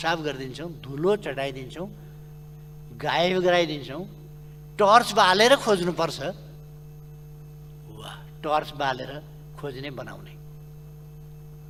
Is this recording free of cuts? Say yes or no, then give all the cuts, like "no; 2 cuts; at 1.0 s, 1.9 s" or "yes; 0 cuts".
yes; 0 cuts